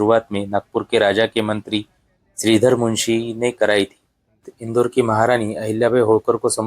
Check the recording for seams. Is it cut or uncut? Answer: cut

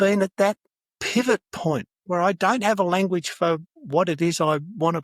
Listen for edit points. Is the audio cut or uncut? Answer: cut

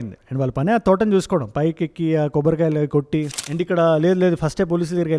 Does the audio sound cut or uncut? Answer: cut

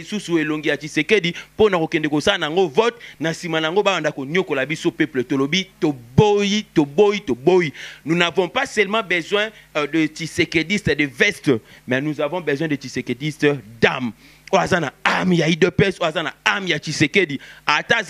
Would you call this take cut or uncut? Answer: uncut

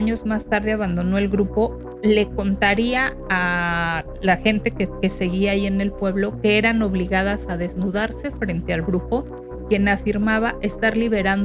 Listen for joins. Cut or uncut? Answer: uncut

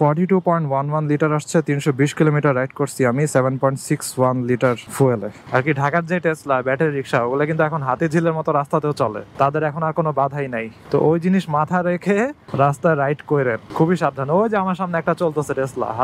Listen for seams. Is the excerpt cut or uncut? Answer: cut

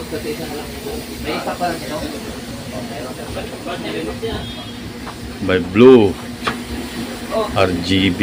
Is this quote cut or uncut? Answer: uncut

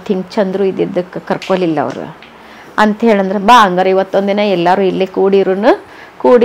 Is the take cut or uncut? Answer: uncut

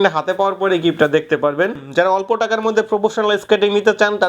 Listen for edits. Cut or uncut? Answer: cut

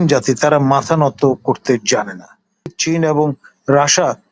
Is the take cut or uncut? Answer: cut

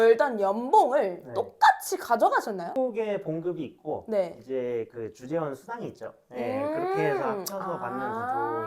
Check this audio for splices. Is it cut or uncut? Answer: cut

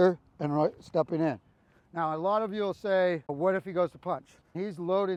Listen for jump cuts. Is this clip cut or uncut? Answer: uncut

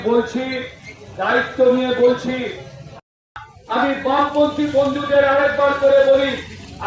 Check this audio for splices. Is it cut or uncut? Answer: cut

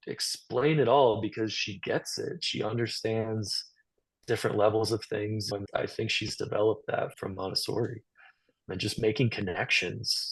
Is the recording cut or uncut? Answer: cut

